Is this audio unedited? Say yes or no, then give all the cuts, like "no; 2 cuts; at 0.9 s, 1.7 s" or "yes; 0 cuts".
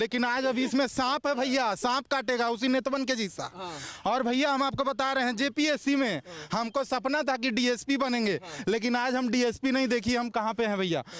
yes; 0 cuts